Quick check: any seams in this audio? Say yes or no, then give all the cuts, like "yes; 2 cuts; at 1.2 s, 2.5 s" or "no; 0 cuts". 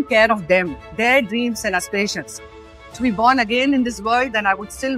yes; 1 cut; at 2.7 s